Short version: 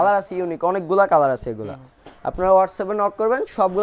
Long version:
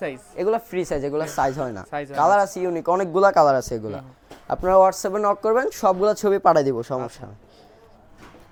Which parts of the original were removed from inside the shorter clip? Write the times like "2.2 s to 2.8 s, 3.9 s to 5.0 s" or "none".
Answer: none